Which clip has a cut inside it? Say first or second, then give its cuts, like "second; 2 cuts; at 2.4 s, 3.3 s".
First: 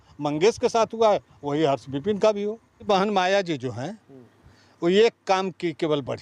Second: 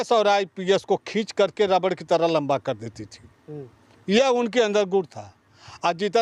first; 1 cut; at 2.8 s